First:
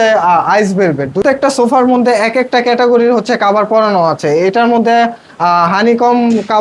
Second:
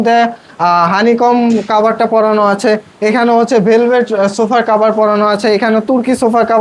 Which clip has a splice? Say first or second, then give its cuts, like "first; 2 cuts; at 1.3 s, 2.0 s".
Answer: first; 1 cut; at 1.2 s